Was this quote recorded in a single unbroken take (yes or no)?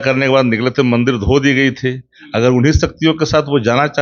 yes